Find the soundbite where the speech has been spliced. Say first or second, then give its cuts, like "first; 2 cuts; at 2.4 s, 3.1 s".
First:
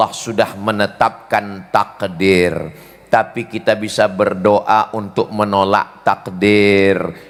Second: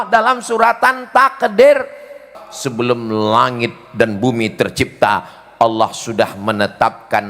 second; 1 cut; at 2.3 s